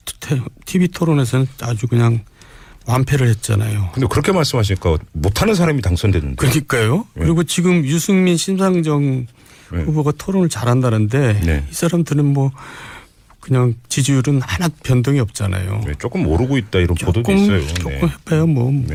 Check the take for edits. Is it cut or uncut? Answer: uncut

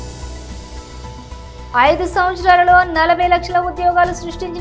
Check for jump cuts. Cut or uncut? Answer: cut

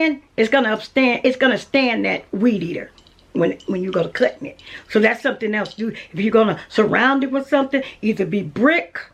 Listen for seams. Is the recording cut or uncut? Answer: uncut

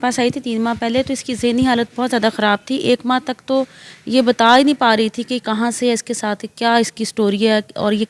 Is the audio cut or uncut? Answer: uncut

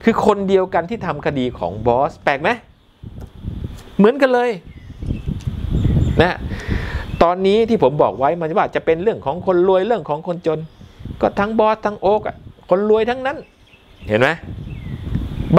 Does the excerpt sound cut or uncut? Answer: uncut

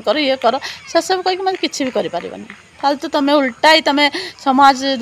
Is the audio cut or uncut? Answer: uncut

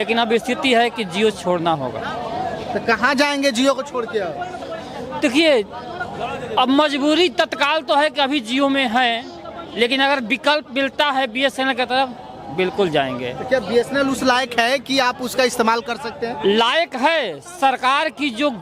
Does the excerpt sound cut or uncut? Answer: uncut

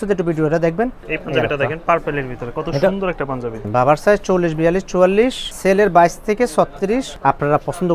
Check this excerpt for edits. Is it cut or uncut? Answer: cut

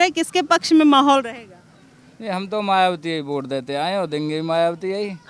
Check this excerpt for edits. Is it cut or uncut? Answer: uncut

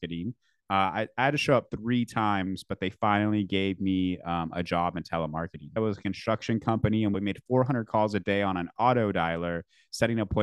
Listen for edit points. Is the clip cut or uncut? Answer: cut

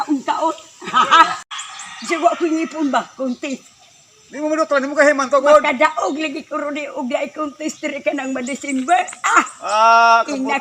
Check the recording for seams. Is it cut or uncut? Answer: cut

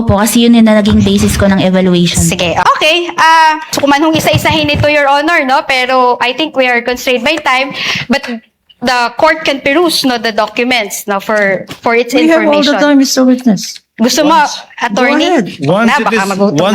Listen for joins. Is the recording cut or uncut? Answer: cut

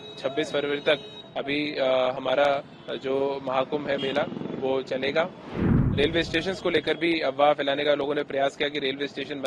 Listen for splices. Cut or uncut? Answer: cut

